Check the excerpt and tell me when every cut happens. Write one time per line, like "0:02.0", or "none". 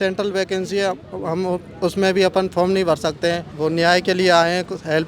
0:03.5